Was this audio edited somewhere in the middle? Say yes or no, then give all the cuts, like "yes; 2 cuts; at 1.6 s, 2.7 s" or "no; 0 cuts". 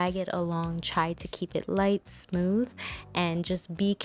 no; 0 cuts